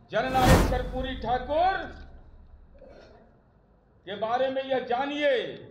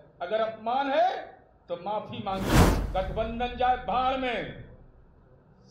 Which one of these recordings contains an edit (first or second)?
second